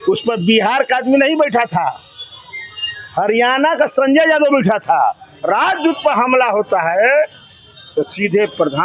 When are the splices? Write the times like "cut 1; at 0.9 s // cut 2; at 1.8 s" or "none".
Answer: cut 1; at 5.3 s